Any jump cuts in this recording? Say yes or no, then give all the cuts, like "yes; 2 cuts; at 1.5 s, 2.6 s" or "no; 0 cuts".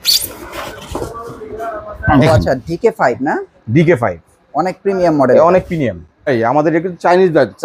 yes; 1 cut; at 6.3 s